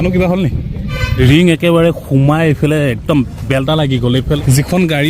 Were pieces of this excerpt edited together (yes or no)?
yes